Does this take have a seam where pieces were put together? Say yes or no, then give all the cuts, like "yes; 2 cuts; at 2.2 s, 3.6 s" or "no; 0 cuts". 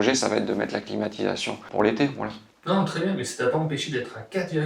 yes; 1 cut; at 1.6 s